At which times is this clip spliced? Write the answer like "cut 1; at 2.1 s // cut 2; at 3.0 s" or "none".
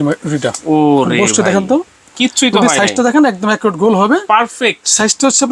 none